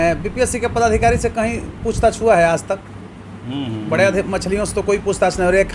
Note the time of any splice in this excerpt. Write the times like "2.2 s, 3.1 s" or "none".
none